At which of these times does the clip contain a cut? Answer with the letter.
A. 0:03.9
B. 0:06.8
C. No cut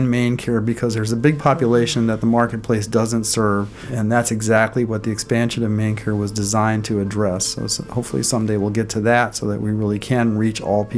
A